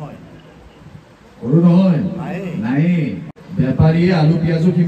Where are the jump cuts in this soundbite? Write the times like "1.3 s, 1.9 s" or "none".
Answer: 3.3 s